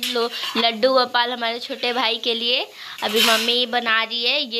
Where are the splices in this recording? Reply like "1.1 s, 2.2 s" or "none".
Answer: none